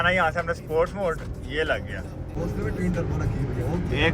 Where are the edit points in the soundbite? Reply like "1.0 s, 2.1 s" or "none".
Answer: 2.3 s